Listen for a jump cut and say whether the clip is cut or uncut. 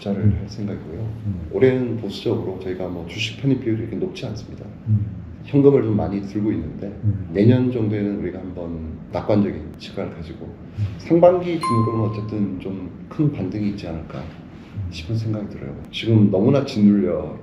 cut